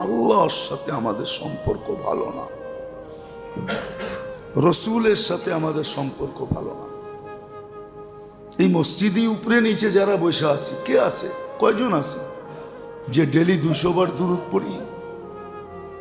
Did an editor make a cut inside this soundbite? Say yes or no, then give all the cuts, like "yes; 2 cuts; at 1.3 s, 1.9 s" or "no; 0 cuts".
no; 0 cuts